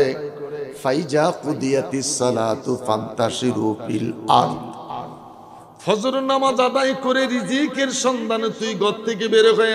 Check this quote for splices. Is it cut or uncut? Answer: uncut